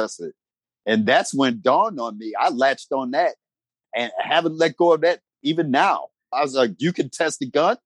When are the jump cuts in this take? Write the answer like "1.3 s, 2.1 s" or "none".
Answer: none